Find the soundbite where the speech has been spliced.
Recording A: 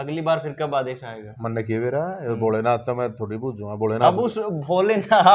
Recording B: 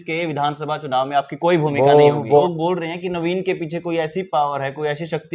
B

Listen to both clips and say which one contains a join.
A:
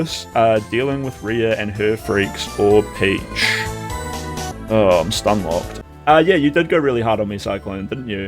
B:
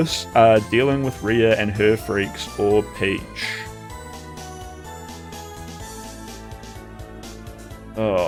A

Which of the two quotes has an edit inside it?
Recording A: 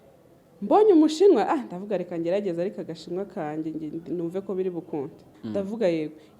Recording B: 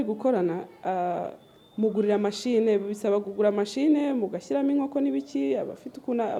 A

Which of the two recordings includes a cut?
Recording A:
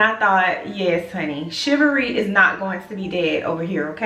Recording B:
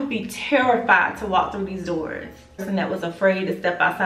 B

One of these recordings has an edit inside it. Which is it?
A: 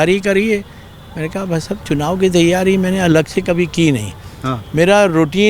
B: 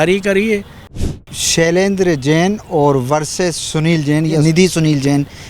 B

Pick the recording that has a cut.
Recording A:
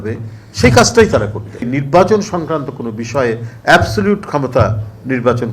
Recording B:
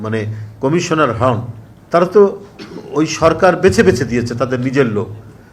A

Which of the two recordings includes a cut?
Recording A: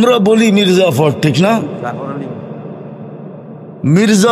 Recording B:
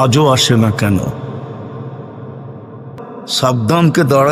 B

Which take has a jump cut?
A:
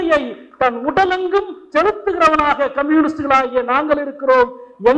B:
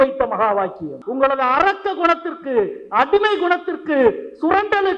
B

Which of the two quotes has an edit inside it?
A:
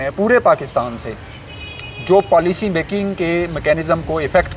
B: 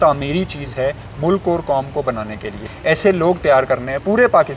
B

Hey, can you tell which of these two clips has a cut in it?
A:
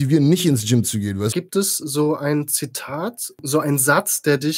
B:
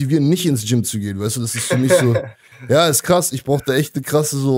A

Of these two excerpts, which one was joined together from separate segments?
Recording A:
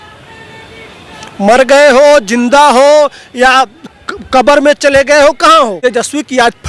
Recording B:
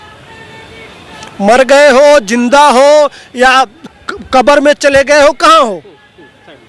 A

